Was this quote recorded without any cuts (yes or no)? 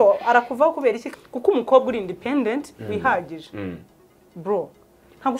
no